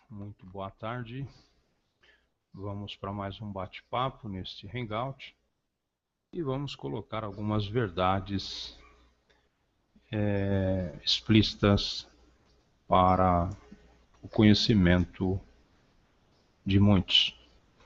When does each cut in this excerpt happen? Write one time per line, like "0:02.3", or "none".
none